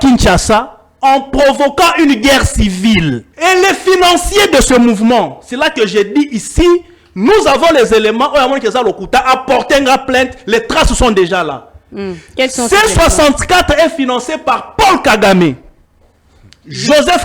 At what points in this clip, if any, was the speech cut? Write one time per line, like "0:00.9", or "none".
0:03.3